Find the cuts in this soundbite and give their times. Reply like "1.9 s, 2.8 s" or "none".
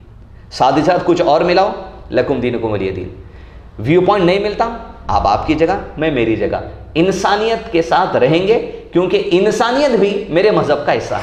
none